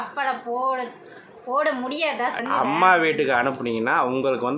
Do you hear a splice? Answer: yes; 1 cut; at 2.4 s

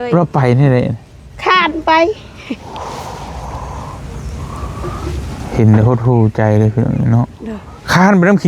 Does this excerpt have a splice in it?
no; 0 cuts

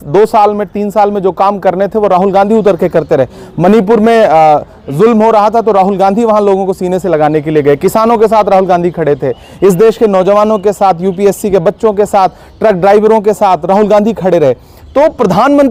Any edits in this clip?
no; 0 cuts

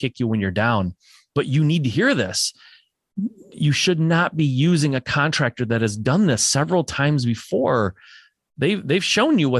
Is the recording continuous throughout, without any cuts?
yes; 0 cuts

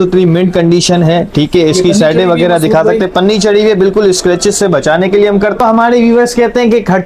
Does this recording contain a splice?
yes; 1 cut; at 5.6 s

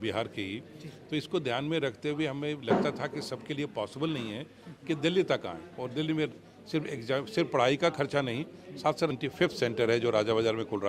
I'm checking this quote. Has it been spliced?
yes; 1 cut; at 9.1 s

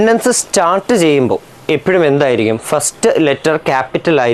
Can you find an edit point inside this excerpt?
no; 0 cuts

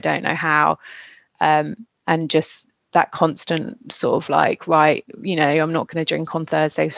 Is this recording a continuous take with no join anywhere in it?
yes; 0 cuts

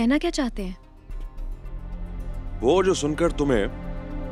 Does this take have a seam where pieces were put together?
no; 0 cuts

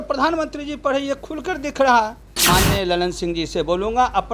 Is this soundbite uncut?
no; 1 cut; at 2.4 s

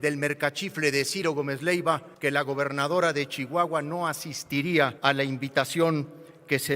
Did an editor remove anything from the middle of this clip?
yes; 2 cuts; at 2.1 s, 5.0 s

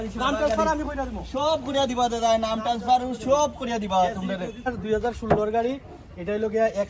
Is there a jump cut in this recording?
yes; 1 cut; at 4.8 s

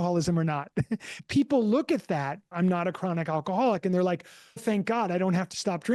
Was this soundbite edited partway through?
yes; 3 cuts; at 1.1 s, 2.5 s, 4.6 s

